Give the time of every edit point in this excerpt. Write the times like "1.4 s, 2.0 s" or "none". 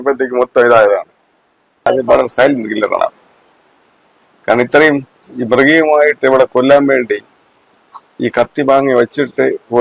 1.9 s